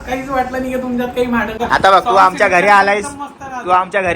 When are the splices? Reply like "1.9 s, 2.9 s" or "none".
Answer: 1.6 s